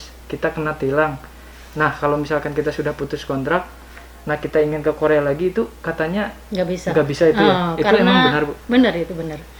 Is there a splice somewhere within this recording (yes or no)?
no